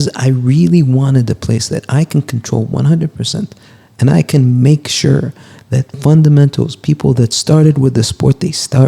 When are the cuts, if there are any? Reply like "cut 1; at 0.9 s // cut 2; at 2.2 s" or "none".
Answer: none